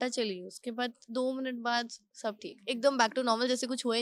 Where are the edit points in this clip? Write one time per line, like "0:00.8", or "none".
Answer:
none